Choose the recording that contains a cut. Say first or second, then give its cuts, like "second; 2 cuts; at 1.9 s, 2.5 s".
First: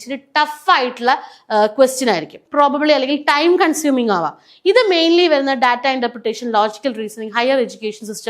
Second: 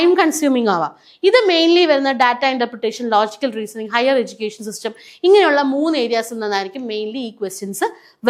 first; 1 cut; at 2.4 s